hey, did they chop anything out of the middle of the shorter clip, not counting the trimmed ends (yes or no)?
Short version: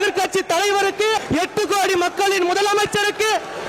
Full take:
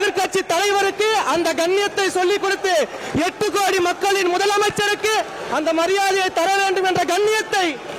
yes